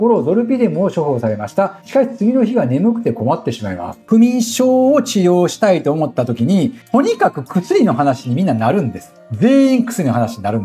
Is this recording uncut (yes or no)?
no